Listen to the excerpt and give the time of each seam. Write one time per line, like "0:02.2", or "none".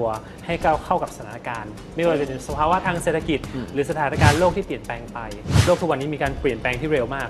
0:05.7